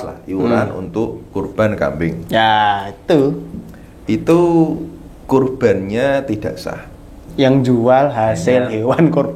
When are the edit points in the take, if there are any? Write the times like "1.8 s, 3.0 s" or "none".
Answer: 7.2 s